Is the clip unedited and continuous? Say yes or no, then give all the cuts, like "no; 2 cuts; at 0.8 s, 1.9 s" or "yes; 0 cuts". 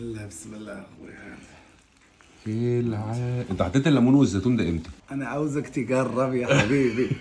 no; 1 cut; at 5.0 s